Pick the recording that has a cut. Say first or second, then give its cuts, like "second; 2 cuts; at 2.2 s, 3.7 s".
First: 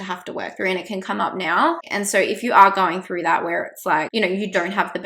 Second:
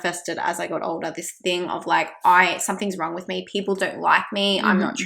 first; 2 cuts; at 1.9 s, 4.1 s